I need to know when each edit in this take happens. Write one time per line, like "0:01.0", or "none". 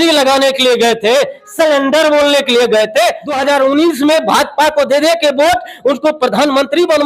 0:03.3